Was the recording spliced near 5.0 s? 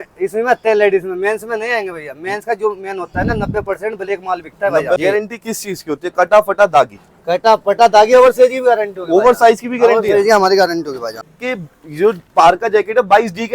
yes; 2 cuts; at 5.0 s, 11.4 s

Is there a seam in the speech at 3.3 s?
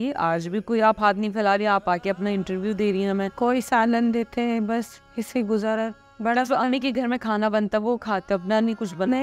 yes; 1 cut; at 3.3 s

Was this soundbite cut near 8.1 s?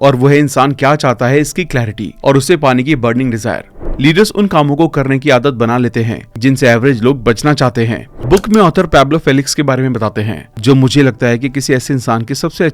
yes; 2 cuts; at 3.7 s, 8.1 s

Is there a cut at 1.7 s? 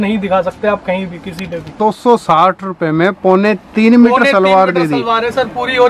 yes; 1 cut; at 1.7 s

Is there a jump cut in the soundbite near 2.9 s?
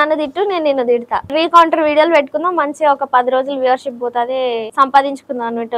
no; 2 cuts; at 1.3 s, 4.7 s

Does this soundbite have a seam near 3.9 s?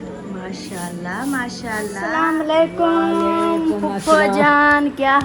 no; 1 cut; at 2.1 s

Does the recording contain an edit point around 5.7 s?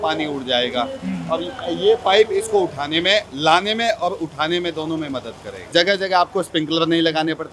yes; 1 cut; at 5.7 s

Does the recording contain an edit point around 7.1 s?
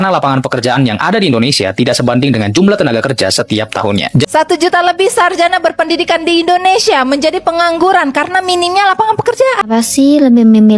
no; 2 cuts; at 4.2 s, 9.6 s

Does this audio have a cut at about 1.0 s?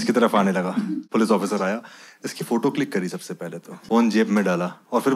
yes; 2 cuts; at 1.0 s, 3.7 s

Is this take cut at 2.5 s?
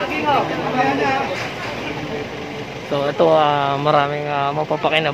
yes; 1 cut; at 2.5 s

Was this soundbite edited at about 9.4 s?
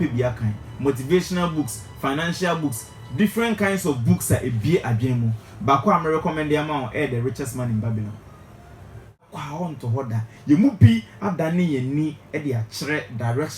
yes; 1 cut; at 9.4 s

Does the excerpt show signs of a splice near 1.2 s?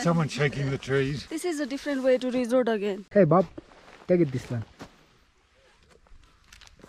yes; 2 cuts; at 1.2 s, 3.0 s

